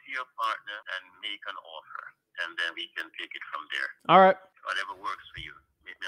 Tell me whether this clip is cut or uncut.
cut